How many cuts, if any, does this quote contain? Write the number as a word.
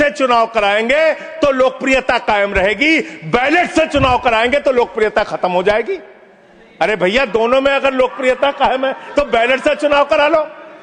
zero